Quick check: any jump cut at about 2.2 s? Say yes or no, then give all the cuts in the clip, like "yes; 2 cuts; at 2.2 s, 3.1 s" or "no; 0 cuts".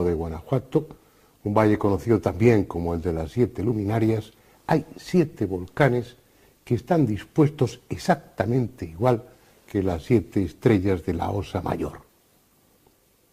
no; 1 cut; at 11.1 s